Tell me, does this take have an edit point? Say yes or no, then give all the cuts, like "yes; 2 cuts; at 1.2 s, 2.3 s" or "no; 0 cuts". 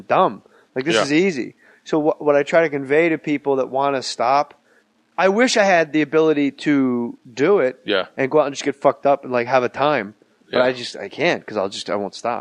no; 0 cuts